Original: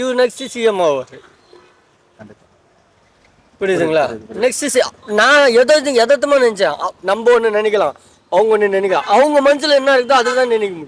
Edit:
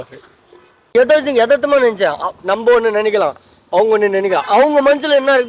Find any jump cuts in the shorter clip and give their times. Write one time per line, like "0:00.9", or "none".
0:00.9